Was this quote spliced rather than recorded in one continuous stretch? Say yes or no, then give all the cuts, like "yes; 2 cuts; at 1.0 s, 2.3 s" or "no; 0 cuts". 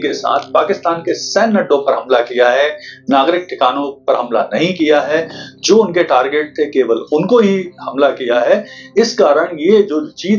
no; 0 cuts